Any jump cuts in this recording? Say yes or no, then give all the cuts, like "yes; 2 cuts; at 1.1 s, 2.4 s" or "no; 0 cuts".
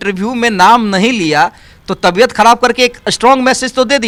no; 0 cuts